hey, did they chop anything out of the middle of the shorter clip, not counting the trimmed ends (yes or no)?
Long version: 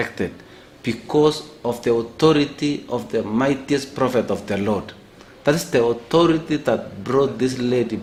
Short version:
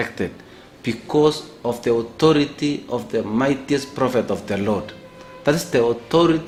no